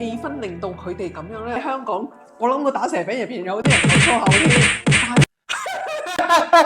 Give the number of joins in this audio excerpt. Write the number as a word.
two